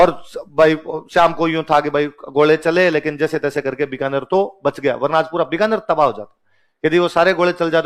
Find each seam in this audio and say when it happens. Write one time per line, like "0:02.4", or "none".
none